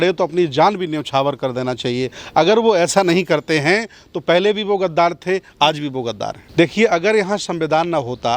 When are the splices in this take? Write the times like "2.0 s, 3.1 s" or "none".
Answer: 6.4 s